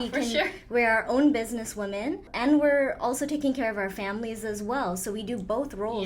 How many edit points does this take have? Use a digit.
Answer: 1